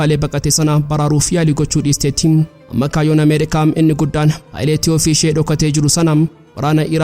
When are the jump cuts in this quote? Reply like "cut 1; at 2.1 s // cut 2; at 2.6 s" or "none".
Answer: cut 1; at 2.6 s // cut 2; at 4.4 s